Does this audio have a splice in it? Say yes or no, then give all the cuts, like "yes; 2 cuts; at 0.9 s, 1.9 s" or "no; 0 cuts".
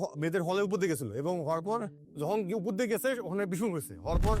yes; 1 cut; at 2.0 s